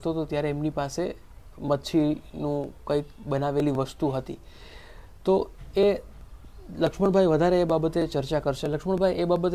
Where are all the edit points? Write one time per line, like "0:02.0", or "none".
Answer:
none